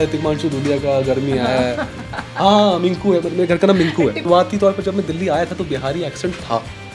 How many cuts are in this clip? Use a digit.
1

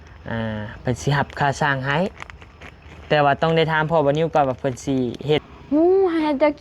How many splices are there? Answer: 1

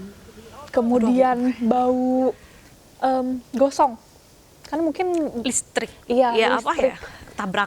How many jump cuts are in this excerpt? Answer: 0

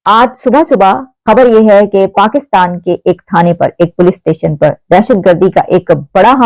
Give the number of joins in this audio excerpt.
1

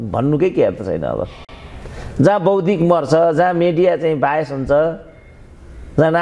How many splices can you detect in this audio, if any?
0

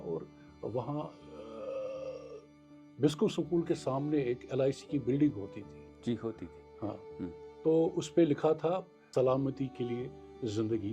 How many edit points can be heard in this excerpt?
1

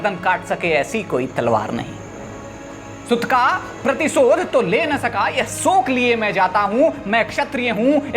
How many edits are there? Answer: 1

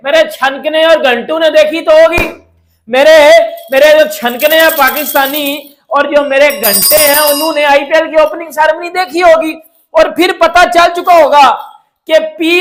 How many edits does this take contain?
0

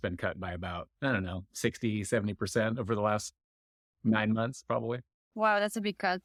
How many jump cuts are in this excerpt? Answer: 0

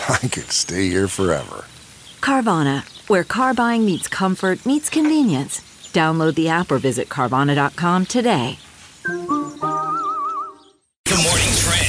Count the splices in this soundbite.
1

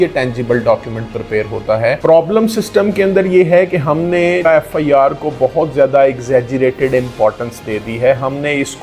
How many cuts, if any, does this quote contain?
2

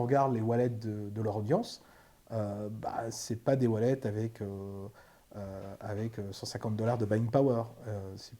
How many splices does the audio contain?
0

